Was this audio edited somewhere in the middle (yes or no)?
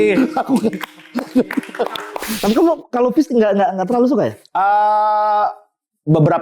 yes